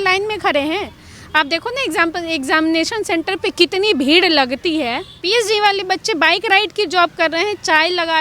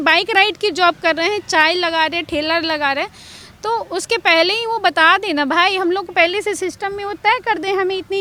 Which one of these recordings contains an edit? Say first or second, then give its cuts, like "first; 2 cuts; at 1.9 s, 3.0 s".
first; 1 cut; at 5.1 s